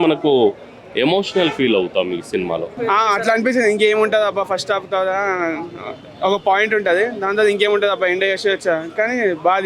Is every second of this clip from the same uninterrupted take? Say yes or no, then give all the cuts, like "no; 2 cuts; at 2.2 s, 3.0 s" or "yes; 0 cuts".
no; 1 cut; at 2.7 s